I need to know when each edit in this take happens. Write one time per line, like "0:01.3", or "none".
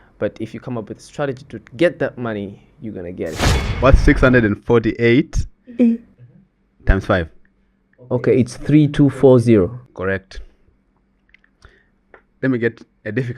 0:03.7
0:09.8